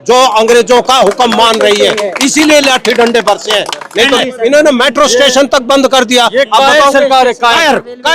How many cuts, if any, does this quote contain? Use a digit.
1